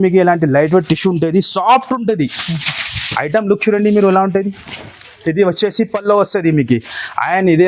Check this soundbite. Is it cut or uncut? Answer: uncut